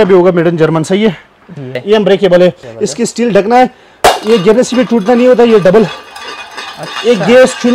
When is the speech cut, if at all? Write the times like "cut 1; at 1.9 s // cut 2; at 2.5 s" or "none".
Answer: cut 1; at 1.8 s // cut 2; at 2.7 s